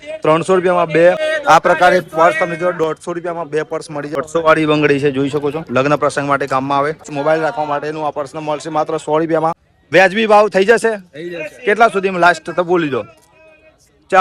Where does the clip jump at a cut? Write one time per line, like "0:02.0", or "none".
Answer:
0:01.2
0:04.2
0:07.1
0:09.7